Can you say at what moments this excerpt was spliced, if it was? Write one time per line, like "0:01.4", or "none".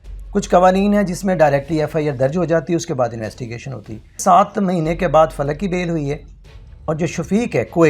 0:04.2